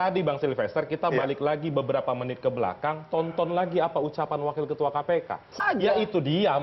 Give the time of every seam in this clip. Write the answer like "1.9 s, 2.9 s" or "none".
5.6 s